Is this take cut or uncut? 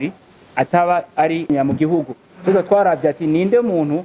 cut